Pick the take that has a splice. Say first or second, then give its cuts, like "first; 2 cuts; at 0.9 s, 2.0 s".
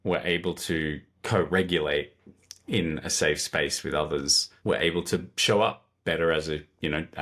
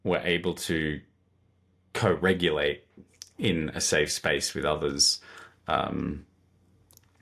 first; 2 cuts; at 1.1 s, 4.4 s